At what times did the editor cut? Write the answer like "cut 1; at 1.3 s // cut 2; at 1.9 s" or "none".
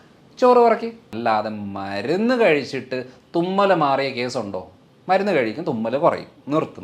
cut 1; at 1.0 s

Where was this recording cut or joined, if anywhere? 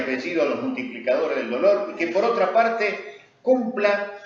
cut 1; at 1.4 s

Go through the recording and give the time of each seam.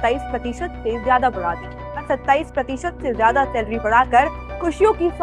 cut 1; at 2.1 s

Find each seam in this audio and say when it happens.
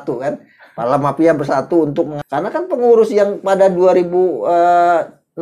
cut 1; at 2.2 s

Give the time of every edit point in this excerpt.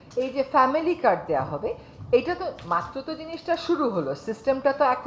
none

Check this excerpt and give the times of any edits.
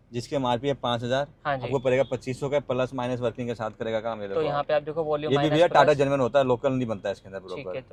none

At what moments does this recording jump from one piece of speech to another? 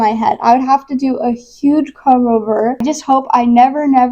cut 1; at 2.8 s

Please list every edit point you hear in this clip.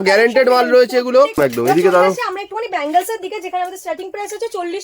cut 1; at 1.4 s

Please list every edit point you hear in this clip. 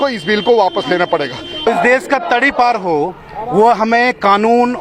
cut 1; at 1.7 s

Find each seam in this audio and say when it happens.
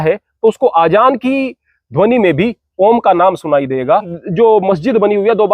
cut 1; at 4.2 s

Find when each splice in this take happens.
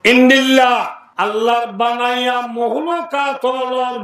cut 1; at 1.0 s

